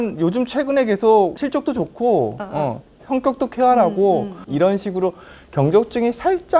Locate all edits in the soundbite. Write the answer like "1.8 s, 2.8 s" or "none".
1.4 s, 4.4 s

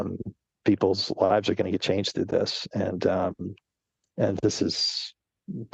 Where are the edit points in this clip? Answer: none

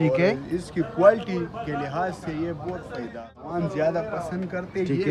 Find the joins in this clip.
3.2 s

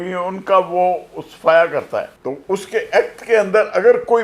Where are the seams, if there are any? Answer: 2.1 s

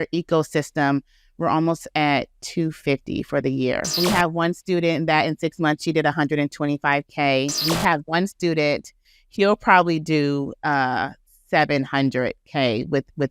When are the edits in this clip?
4.0 s, 7.6 s, 9.1 s

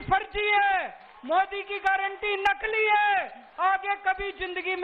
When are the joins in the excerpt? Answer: none

